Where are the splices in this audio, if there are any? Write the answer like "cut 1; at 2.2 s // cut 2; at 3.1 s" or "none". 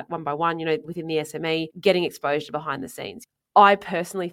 cut 1; at 1.3 s // cut 2; at 3.3 s